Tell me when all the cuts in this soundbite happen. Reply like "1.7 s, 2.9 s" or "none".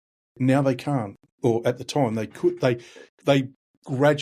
1.2 s